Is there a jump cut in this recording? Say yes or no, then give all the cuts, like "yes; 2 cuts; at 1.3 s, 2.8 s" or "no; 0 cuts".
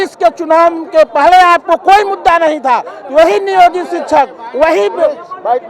no; 0 cuts